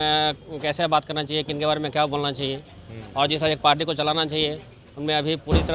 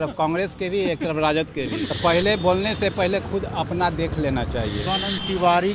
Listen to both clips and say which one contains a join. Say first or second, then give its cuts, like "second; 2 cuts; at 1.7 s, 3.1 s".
second; 2 cuts; at 1.9 s, 4.8 s